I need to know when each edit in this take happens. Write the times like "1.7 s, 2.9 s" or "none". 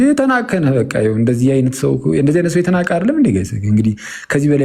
none